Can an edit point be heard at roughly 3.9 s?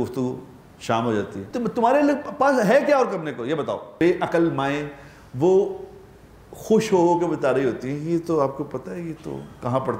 yes; 2 cuts; at 1.4 s, 3.9 s

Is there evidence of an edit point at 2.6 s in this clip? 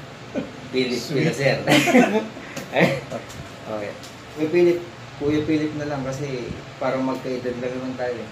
no; 1 cut; at 4.4 s

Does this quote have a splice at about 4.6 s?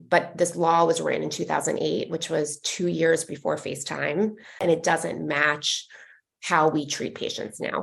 yes; 1 cut; at 4.6 s

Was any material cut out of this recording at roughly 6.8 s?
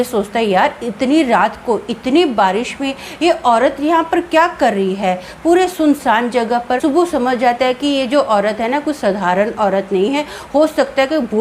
yes; 1 cut; at 6.8 s

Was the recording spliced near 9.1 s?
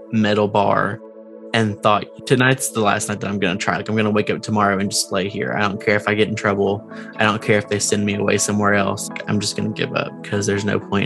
yes; 1 cut; at 9.1 s

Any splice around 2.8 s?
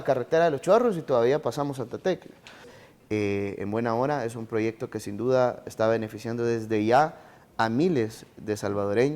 yes; 1 cut; at 2.8 s

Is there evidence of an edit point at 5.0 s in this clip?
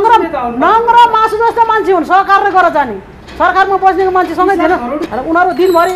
yes; 1 cut; at 5.0 s

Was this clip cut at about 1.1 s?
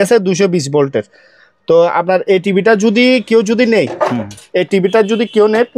no; 0 cuts

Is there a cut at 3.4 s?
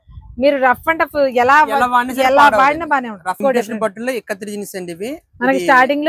yes; 1 cut; at 3.4 s

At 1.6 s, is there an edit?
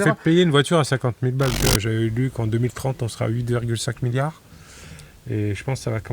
yes; 1 cut; at 1.6 s

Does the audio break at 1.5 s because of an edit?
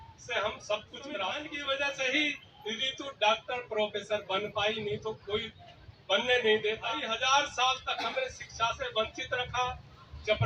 yes; 2 cuts; at 1.5 s, 7.1 s

